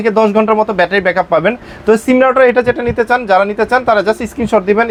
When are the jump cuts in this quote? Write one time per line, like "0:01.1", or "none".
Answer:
none

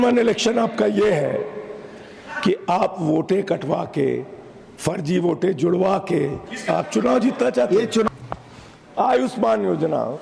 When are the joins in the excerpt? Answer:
0:08.1

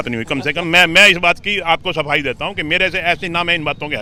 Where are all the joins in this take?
none

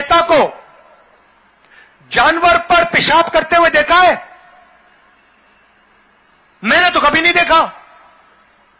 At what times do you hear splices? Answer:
none

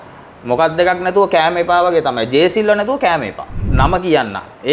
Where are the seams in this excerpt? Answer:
0:03.7

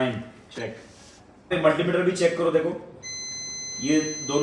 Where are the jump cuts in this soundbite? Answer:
0:01.5

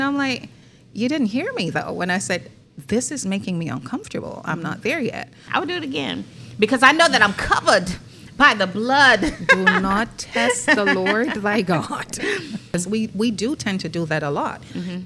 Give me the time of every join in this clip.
0:05.4
0:12.7

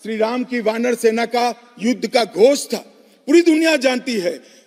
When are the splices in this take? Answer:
none

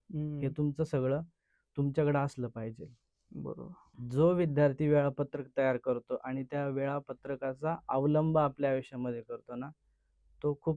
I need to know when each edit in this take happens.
0:03.8

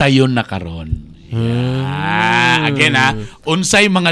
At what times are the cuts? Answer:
none

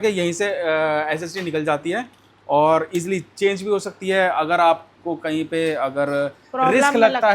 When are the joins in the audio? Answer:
none

